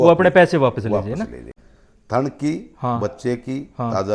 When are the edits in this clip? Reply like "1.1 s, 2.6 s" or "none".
1.5 s

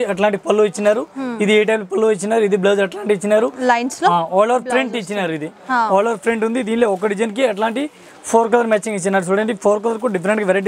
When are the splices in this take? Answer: none

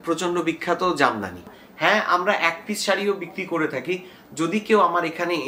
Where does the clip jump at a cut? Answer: 1.5 s

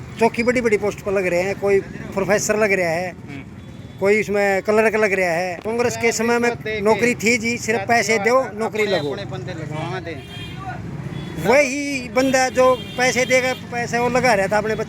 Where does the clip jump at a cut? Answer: 5.6 s

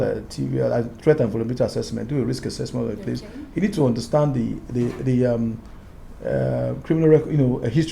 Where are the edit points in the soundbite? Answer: none

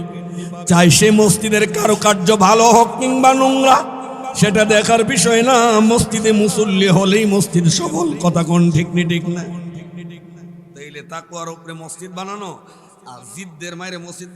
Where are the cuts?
none

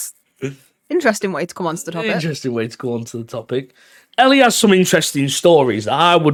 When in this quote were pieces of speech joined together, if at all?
none

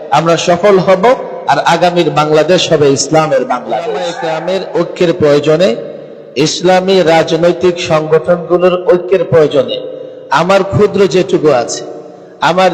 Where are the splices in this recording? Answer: 4.2 s

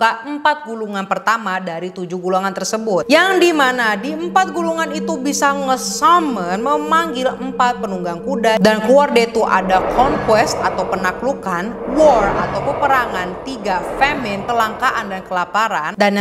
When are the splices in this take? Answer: none

